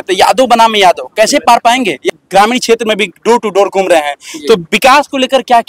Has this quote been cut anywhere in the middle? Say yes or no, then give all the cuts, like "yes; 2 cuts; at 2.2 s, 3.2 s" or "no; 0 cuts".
yes; 1 cut; at 2.1 s